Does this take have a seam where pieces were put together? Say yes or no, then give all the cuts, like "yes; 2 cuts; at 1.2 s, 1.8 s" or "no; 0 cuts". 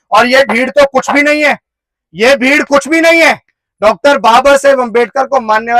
no; 0 cuts